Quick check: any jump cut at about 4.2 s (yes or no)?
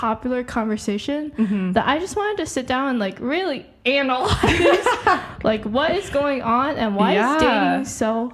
no